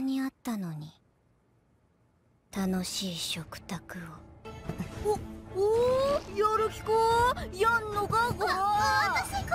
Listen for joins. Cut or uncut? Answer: uncut